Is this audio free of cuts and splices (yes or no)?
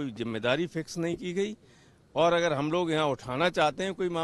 yes